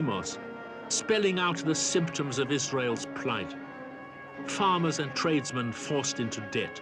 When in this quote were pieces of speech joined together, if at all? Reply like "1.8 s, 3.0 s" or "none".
3.9 s